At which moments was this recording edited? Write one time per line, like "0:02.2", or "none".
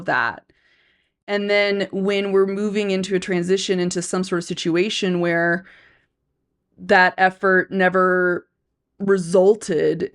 0:01.3